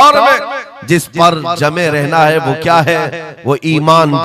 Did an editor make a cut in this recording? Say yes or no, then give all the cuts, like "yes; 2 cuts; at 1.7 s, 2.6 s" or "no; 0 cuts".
no; 0 cuts